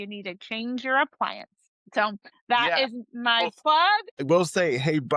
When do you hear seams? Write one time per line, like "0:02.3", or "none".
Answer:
0:02.1
0:04.2